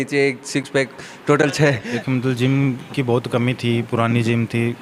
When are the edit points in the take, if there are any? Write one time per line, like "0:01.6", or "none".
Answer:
0:02.0